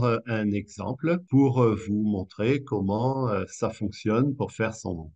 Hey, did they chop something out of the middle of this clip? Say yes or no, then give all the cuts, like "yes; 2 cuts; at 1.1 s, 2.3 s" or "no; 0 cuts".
yes; 1 cut; at 1.2 s